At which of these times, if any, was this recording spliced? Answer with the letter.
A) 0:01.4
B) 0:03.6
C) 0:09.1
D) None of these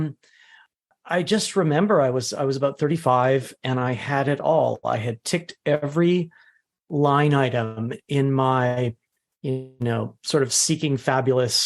C